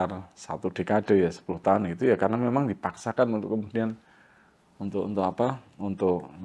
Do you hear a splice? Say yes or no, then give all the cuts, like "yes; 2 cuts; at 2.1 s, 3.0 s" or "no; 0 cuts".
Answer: no; 0 cuts